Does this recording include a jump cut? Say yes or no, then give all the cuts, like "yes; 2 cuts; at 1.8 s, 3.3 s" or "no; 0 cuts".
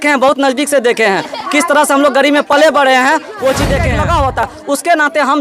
yes; 1 cut; at 3.9 s